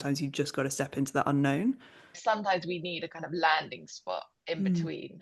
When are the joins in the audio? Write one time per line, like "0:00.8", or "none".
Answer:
0:02.2